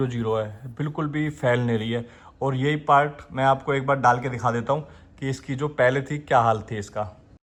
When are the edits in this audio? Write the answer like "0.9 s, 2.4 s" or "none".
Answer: none